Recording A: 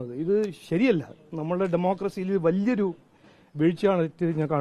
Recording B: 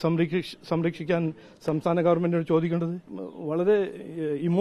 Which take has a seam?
B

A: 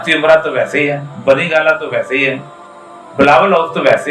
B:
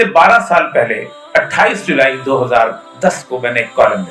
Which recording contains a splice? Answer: B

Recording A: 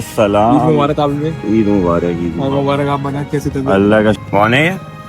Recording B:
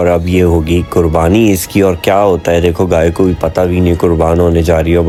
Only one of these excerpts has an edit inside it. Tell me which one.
A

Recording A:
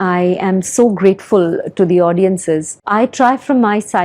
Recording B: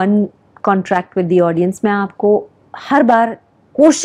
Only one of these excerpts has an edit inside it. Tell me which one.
A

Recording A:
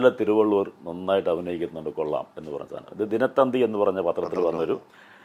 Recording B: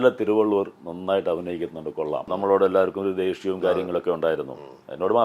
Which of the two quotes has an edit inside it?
B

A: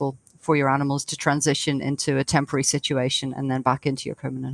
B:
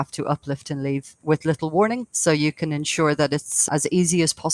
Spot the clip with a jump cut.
B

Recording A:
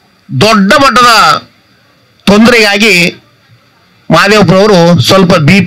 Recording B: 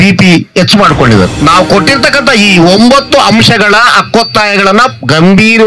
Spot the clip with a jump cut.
B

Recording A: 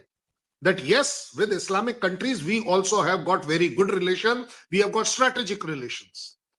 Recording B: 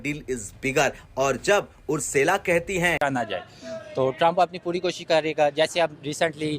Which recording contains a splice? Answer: B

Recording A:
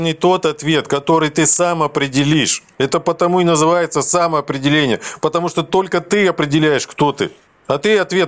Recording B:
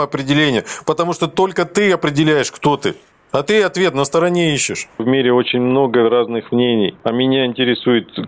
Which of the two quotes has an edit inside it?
B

